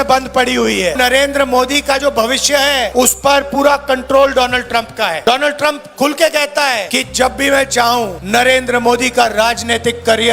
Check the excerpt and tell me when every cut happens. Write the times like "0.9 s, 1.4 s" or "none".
0.9 s, 2.9 s, 5.2 s, 6.9 s, 8.2 s